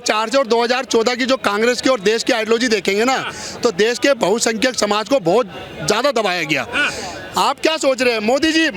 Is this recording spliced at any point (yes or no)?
no